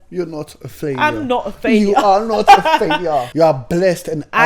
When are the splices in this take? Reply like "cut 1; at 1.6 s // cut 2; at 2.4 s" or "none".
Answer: cut 1; at 3.3 s